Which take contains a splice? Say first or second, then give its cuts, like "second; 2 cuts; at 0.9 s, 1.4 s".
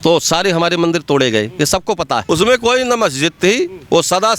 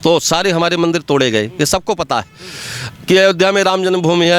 first; 1 cut; at 2.2 s